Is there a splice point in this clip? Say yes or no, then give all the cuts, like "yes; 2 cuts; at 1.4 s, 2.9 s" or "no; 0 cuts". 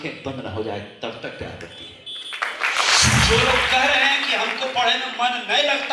yes; 1 cut; at 3.1 s